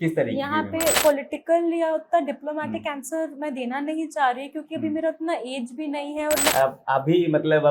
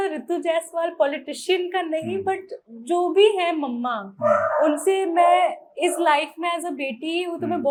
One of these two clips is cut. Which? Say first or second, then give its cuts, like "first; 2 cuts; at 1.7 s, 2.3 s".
first; 2 cuts; at 1.0 s, 6.5 s